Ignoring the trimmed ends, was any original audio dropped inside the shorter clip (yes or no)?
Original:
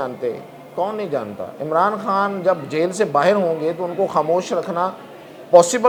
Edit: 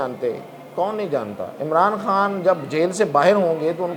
no